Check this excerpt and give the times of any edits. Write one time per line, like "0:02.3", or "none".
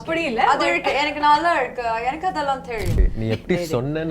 0:03.1